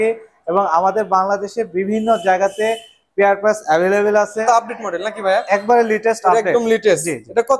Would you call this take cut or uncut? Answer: cut